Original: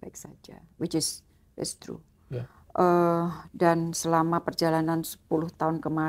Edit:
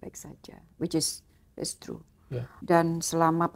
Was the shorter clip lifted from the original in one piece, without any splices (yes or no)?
no